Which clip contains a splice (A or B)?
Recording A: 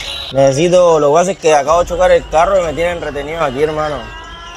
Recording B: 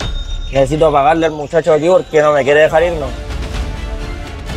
B